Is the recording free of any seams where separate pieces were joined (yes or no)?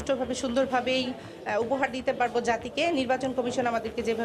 yes